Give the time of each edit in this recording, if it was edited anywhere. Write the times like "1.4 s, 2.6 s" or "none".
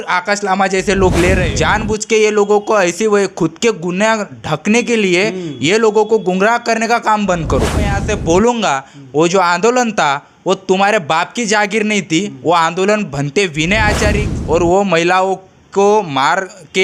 1.5 s, 8.0 s, 14.3 s